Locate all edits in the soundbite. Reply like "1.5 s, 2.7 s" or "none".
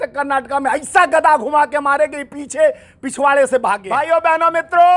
4.0 s